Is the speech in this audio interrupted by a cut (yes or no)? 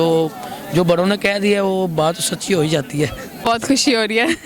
yes